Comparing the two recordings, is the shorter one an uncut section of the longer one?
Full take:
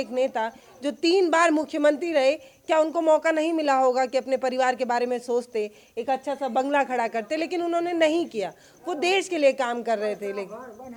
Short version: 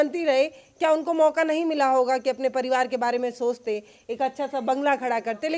yes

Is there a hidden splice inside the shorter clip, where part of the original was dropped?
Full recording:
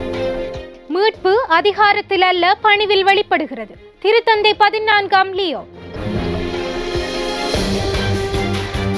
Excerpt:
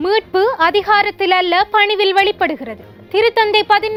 no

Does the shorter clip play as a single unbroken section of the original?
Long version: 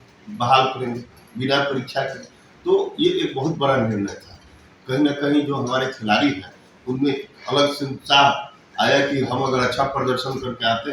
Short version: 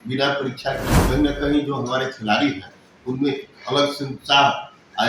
no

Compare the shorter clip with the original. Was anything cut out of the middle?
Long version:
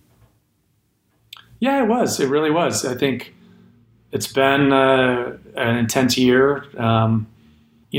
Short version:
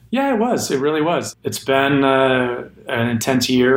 yes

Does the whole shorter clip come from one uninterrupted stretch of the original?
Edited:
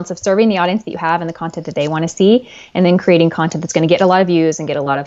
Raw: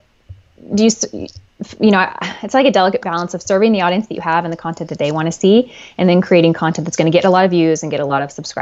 yes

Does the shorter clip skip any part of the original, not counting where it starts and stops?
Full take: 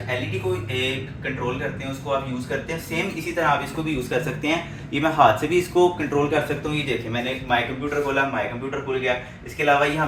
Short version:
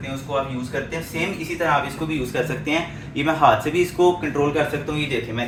no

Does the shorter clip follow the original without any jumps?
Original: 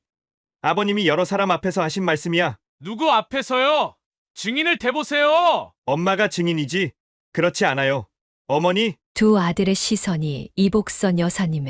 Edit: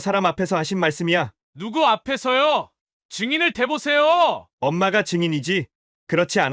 yes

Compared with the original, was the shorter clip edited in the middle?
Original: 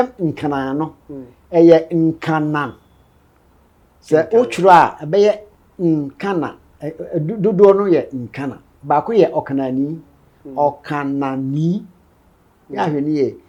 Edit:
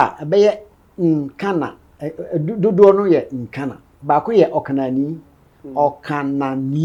no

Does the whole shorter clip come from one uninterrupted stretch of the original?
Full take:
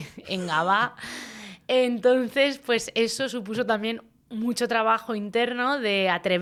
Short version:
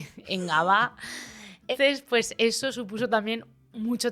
no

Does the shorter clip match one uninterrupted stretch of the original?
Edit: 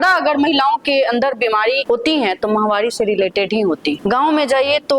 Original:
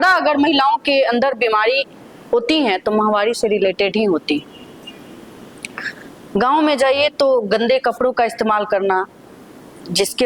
no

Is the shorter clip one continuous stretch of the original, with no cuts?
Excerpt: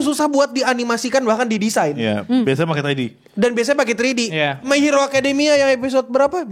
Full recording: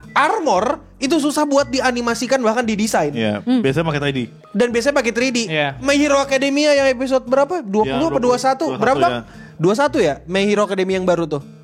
yes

